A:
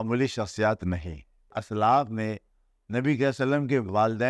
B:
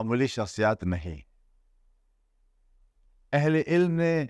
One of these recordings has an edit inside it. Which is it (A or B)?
A